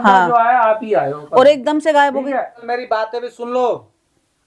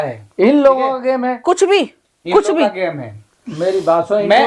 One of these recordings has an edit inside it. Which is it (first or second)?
first